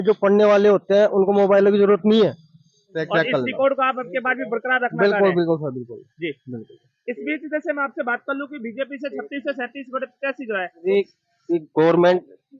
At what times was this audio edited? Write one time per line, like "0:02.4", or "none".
0:02.9
0:10.8